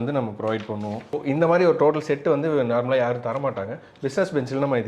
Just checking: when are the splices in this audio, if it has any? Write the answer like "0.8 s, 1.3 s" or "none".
none